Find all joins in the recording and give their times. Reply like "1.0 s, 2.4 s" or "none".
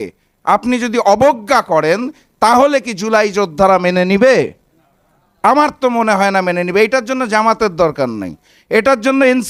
none